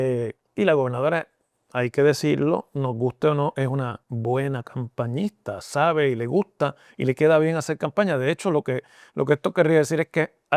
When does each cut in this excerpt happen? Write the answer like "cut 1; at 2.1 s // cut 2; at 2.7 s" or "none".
none